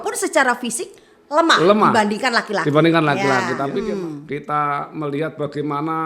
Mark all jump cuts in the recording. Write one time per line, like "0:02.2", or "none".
0:03.7